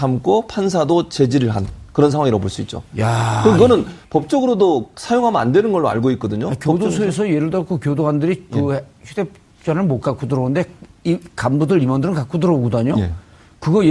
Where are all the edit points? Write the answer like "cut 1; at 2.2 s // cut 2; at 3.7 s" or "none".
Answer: cut 1; at 5.3 s